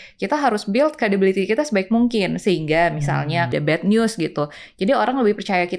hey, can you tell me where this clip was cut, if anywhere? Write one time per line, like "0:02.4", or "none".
0:03.5